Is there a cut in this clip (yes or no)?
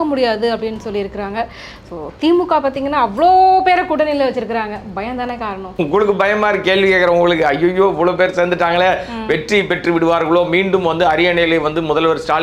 yes